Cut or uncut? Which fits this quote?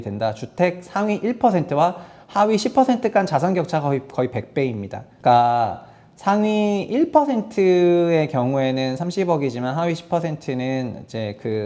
uncut